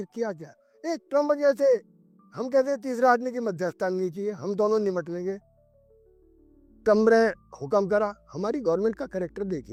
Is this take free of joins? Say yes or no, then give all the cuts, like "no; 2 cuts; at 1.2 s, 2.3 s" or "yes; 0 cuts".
yes; 0 cuts